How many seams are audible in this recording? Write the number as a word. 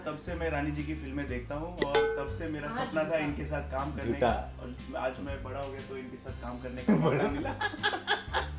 zero